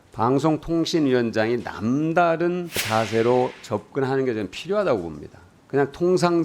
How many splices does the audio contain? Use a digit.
1